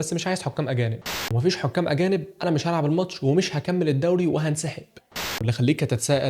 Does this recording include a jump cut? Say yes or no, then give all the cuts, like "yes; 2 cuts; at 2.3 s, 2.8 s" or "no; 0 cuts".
yes; 2 cuts; at 1.0 s, 5.3 s